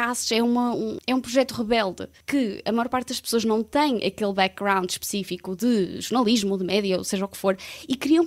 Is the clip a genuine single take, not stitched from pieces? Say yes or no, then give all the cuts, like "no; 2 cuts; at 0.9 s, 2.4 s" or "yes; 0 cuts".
no; 2 cuts; at 0.9 s, 2.1 s